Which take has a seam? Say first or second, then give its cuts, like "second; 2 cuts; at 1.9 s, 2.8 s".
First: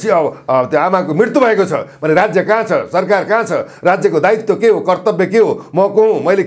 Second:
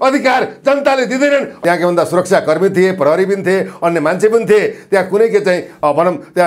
second; 1 cut; at 1.5 s